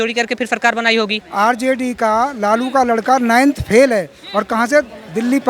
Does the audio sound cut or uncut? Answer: cut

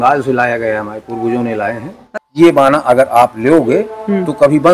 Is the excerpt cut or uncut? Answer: cut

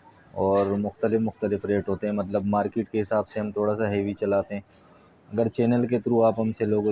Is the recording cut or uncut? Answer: uncut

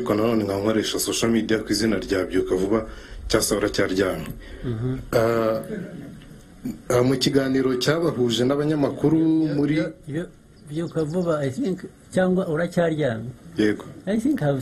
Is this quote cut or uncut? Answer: uncut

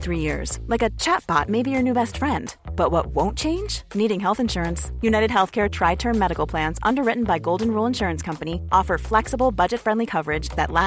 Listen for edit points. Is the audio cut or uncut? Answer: uncut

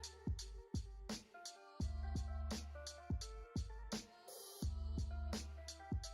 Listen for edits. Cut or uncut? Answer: cut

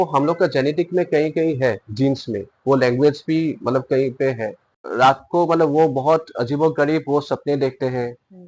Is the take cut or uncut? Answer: cut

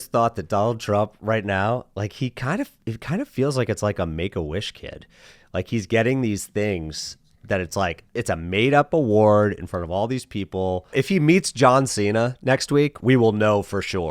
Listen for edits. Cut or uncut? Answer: cut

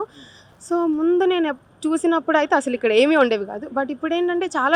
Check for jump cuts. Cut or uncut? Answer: uncut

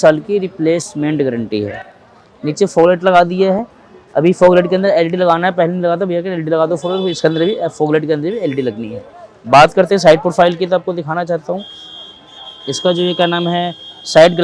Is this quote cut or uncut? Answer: uncut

